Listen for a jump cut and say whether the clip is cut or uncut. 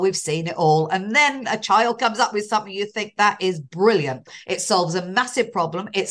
cut